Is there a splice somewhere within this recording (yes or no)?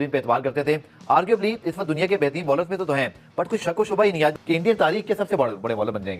no